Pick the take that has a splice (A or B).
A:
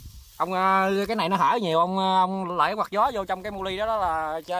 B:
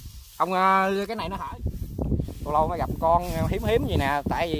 B